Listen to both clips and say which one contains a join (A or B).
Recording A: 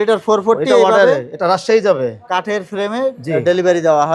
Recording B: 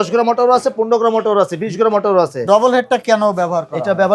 B